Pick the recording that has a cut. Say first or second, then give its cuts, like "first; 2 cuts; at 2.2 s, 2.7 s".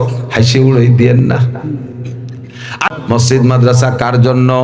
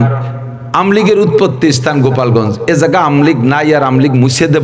first; 1 cut; at 2.9 s